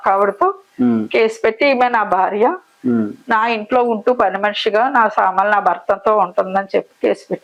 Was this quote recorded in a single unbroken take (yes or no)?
yes